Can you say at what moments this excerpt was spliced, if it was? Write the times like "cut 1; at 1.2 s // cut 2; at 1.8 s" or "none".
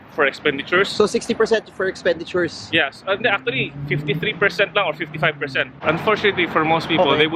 cut 1; at 5.7 s

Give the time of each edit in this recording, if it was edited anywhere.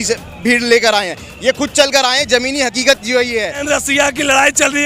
cut 1; at 3.6 s

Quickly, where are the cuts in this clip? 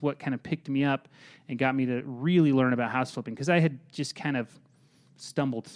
none

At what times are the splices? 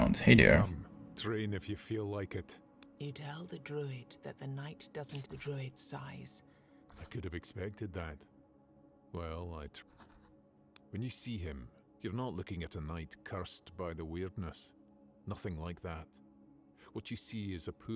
none

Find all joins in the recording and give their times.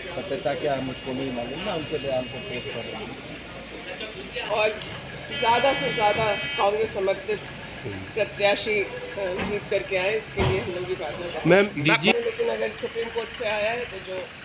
cut 1; at 4.4 s // cut 2; at 12.1 s

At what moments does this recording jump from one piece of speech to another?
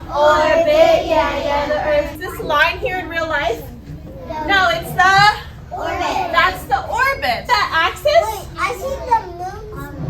cut 1; at 2.2 s // cut 2; at 7.5 s

